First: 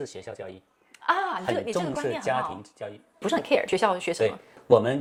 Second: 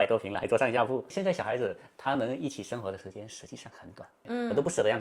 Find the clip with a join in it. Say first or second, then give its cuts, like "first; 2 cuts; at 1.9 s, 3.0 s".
second; 1 cut; at 1.1 s